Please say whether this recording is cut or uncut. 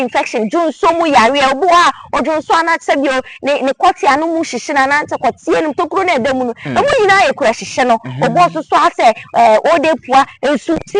uncut